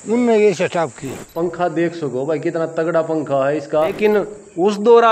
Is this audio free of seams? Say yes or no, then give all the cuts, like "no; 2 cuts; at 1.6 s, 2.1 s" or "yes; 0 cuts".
no; 2 cuts; at 1.2 s, 3.9 s